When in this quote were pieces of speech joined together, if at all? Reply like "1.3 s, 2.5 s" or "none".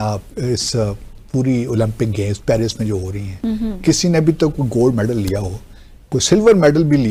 none